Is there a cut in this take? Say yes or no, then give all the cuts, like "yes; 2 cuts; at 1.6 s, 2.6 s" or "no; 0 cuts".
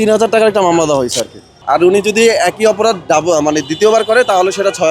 yes; 1 cut; at 1.5 s